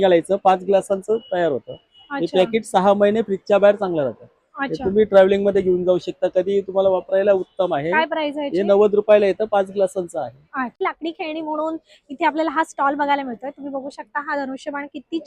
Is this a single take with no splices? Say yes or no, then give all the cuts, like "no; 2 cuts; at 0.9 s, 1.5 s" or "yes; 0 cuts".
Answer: no; 1 cut; at 10.8 s